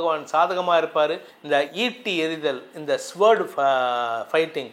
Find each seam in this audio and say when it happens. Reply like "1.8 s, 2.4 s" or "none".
1.3 s